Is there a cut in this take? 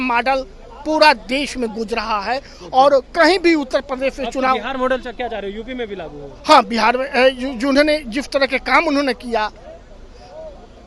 no; 0 cuts

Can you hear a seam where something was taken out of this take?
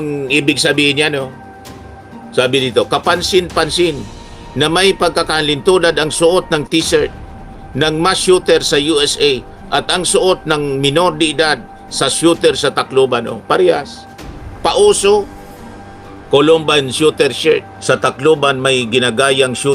yes; 1 cut; at 17.7 s

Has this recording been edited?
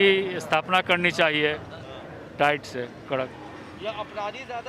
no; 0 cuts

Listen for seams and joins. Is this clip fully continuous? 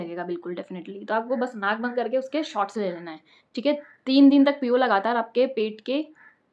yes; 0 cuts

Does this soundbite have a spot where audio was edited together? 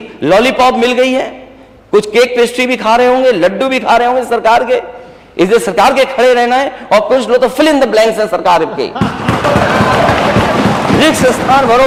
no; 0 cuts

